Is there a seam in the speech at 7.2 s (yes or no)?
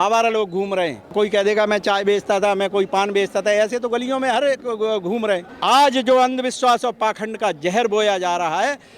no